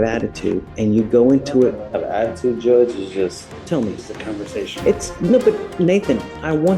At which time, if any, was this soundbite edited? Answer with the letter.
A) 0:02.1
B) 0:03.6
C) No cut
B